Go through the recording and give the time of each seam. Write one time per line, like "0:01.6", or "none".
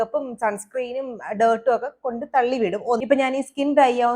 0:03.0